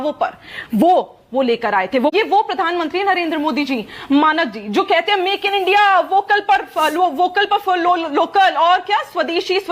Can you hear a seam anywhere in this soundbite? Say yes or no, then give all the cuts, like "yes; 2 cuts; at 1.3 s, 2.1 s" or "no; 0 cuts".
yes; 1 cut; at 2.1 s